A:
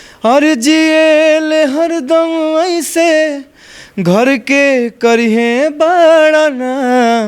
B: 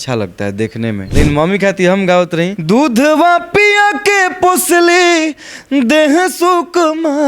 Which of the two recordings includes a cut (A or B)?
B